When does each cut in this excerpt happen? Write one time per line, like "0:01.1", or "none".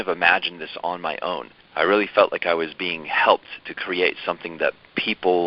0:01.6

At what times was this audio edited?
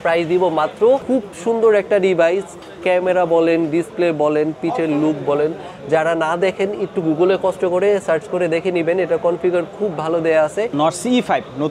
0:01.0
0:10.7

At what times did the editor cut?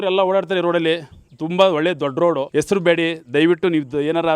0:02.4

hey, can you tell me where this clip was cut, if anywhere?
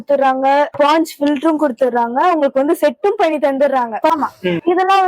0:04.1

